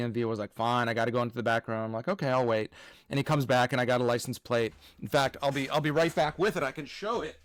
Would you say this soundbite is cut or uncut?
uncut